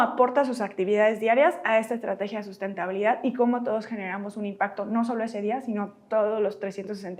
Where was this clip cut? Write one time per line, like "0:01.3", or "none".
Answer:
none

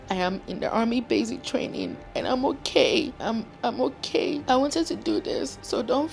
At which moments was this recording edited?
none

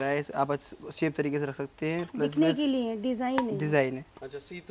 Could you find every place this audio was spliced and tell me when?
none

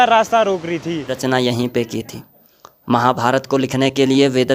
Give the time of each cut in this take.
0:01.2

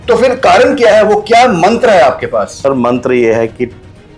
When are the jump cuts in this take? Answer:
0:02.5

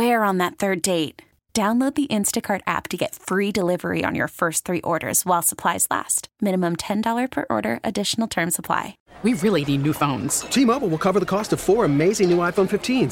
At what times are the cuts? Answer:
0:09.0

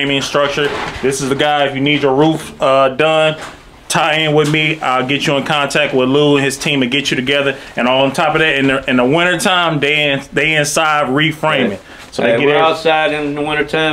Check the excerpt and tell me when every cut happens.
none

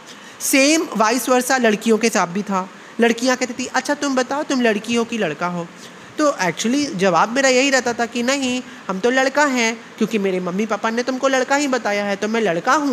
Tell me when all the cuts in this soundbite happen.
none

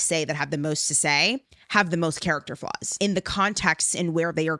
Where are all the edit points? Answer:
0:02.9

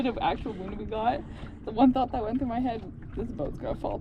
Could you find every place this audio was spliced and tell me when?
none

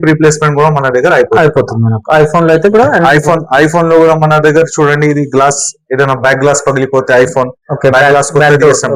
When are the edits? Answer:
none

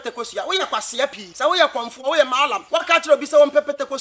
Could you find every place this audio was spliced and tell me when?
0:01.2
0:02.6

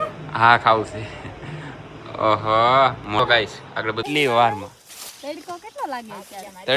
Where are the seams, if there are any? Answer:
0:04.0

